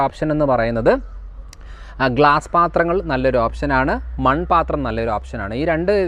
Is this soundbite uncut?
yes; 0 cuts

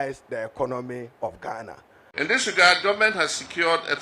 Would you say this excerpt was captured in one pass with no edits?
no; 1 cut; at 2.1 s

